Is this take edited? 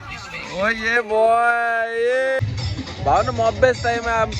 yes; 1 cut; at 2.4 s

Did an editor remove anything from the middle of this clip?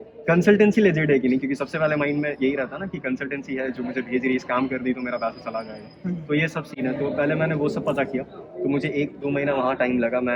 no; 0 cuts

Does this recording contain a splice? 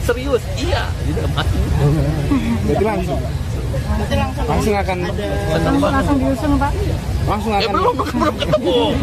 no; 0 cuts

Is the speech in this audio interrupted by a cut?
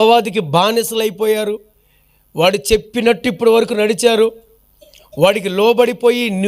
no; 0 cuts

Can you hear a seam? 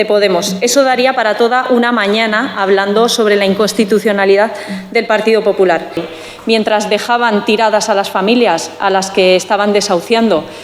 yes; 1 cut; at 6.0 s

